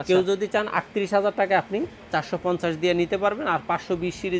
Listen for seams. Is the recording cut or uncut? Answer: uncut